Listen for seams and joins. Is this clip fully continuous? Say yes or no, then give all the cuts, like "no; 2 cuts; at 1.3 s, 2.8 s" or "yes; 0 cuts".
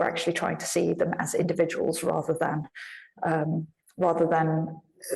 yes; 0 cuts